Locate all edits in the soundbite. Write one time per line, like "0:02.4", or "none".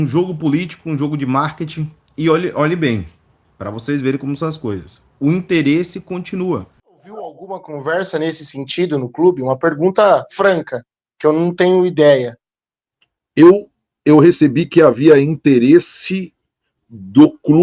0:07.3